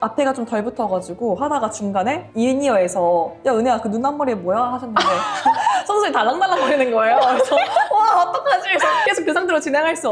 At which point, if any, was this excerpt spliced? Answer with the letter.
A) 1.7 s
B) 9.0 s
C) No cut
B